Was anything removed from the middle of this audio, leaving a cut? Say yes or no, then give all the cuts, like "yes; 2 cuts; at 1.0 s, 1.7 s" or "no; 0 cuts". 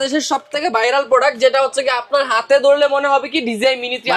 no; 0 cuts